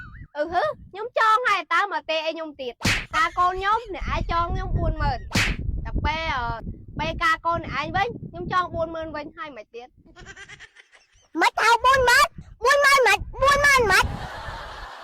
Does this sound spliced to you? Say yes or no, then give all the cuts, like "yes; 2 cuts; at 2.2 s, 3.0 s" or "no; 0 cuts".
yes; 1 cut; at 3.1 s